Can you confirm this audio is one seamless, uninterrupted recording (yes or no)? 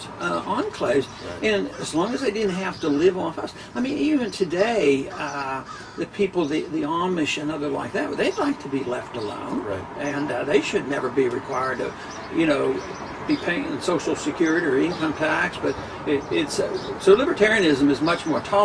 yes